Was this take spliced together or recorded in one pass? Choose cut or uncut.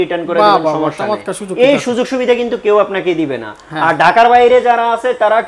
uncut